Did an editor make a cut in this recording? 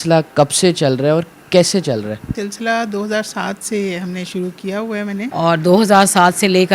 yes; 2 cuts; at 2.3 s, 5.3 s

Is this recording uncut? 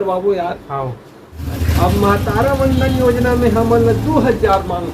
no; 1 cut; at 1.4 s

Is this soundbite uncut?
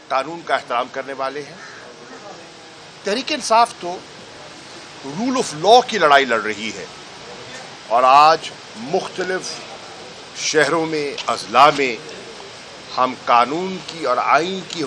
yes; 0 cuts

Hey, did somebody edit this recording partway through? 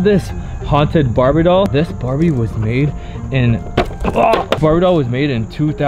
no; 0 cuts

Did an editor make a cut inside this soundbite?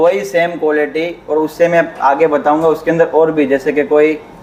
no; 0 cuts

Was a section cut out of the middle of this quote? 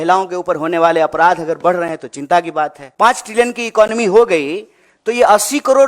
yes; 1 cut; at 2.8 s

